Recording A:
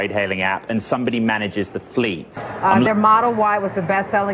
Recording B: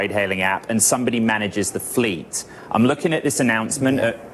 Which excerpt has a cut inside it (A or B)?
A